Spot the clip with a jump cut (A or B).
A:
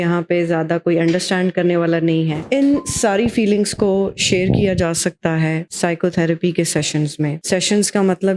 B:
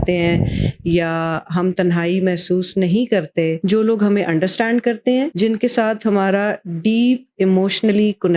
A